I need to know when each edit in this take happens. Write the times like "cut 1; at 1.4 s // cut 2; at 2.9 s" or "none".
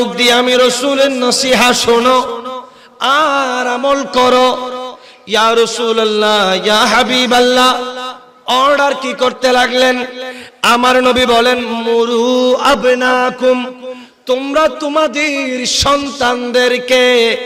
none